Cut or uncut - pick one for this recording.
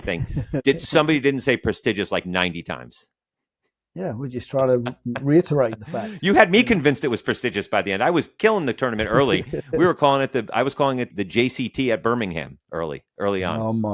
uncut